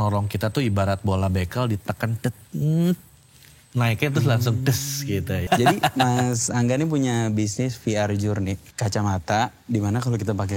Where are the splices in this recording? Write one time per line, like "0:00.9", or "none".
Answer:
0:05.5
0:08.7